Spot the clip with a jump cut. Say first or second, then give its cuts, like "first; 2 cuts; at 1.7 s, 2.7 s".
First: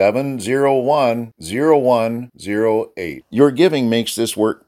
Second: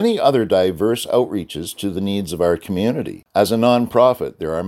second; 1 cut; at 3.2 s